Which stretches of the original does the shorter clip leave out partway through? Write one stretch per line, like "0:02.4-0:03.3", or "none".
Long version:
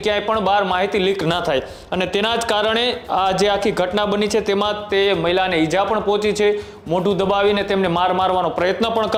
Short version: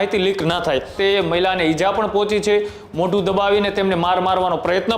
0:01.7-0:04.8